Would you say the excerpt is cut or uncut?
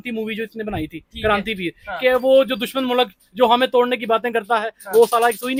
uncut